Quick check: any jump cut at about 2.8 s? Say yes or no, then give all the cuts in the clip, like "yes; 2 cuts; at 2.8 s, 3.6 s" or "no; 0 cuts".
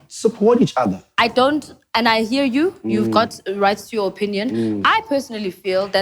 no; 1 cut; at 1.0 s